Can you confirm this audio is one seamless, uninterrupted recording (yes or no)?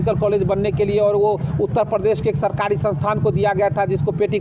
yes